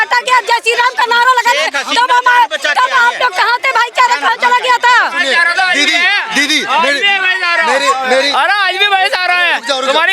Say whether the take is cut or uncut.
uncut